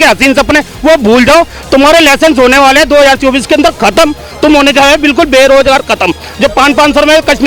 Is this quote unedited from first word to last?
yes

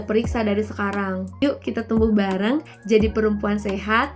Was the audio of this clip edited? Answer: yes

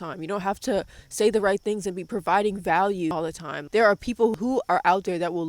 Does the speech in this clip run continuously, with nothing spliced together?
no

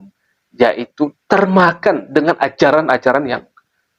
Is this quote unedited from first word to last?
yes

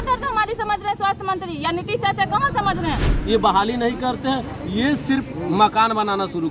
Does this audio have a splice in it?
yes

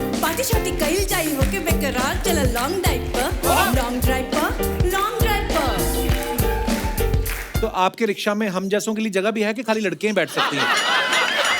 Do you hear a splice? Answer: yes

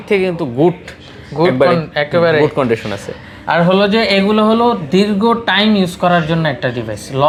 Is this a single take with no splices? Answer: yes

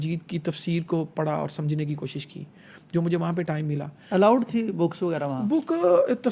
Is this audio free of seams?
yes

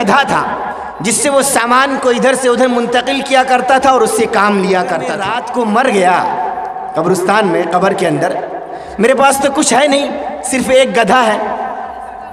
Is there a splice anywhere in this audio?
yes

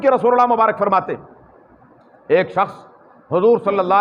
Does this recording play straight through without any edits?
yes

